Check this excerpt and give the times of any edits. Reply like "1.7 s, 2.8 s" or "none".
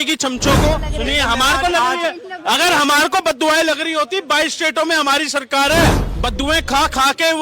0.9 s, 6.1 s